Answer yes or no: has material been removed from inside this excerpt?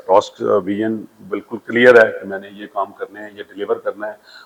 no